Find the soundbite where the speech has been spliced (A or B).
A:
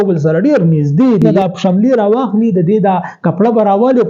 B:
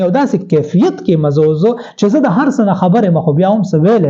A